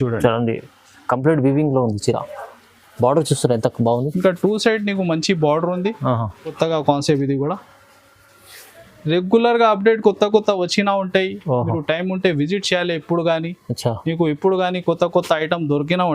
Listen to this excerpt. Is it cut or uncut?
cut